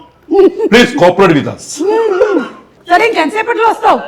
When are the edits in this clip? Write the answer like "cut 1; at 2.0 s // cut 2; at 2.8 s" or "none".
none